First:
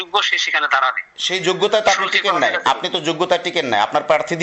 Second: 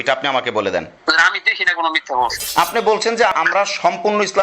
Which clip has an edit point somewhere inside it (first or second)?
second